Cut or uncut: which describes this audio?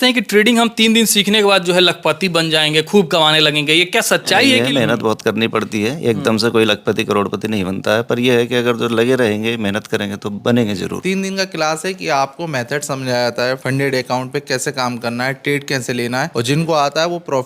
cut